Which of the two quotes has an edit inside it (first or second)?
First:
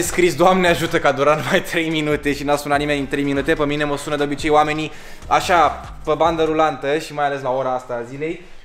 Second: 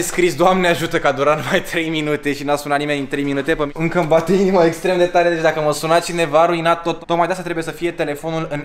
second